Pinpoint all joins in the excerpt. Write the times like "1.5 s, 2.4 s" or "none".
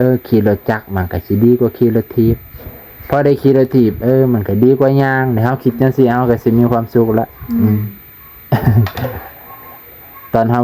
none